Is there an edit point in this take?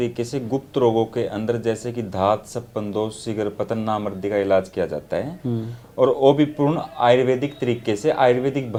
no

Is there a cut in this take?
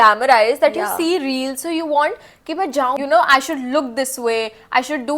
yes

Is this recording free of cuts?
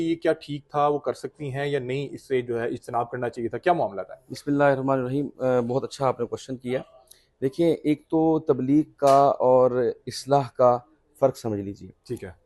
yes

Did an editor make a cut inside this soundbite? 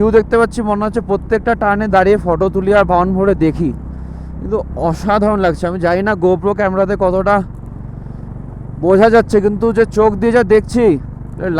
no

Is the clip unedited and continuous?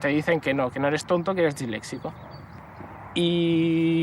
yes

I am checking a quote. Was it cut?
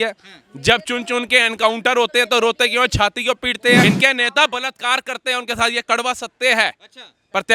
yes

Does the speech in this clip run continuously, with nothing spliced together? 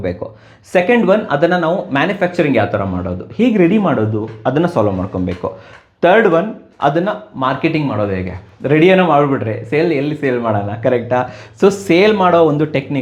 yes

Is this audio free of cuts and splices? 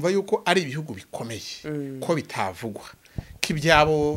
yes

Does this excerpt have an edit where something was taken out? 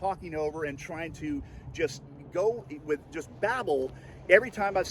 no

